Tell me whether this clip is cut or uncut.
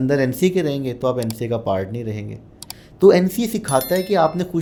uncut